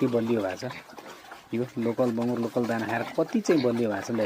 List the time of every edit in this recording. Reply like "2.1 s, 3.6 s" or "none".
none